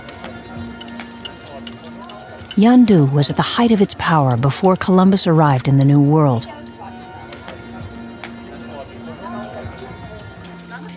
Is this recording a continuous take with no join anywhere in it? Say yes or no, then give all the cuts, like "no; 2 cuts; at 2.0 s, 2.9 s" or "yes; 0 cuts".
yes; 0 cuts